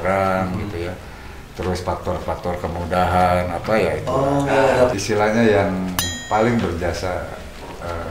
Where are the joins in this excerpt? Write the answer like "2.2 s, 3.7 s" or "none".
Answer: 4.9 s